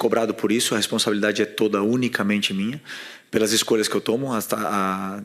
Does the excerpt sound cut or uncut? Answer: uncut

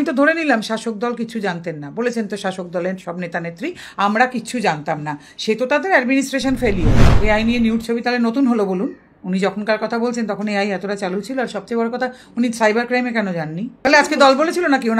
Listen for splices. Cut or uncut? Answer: cut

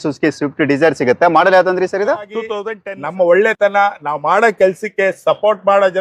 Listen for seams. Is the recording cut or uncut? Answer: cut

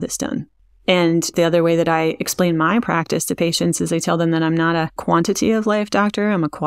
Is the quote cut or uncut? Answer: uncut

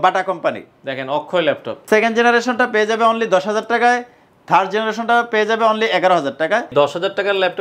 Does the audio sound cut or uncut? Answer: cut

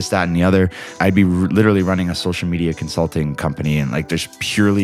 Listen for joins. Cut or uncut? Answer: cut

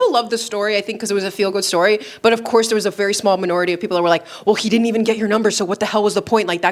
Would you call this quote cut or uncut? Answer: uncut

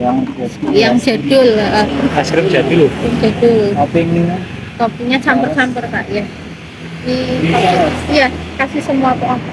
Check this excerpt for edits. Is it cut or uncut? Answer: uncut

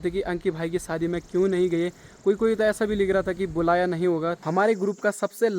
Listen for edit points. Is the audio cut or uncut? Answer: cut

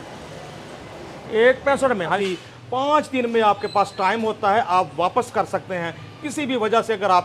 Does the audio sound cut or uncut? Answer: cut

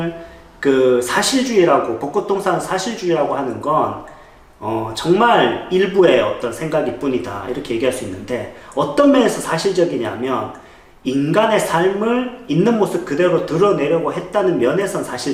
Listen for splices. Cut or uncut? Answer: uncut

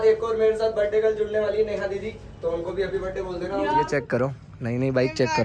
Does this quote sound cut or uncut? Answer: cut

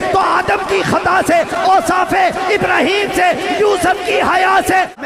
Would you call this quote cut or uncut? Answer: uncut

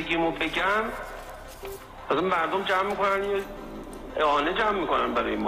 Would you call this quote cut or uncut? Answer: uncut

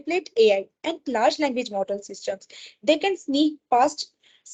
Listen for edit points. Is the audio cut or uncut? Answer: uncut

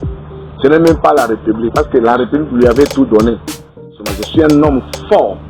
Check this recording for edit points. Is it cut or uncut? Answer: cut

